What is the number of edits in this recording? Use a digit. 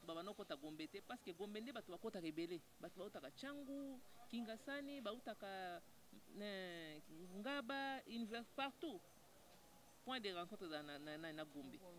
0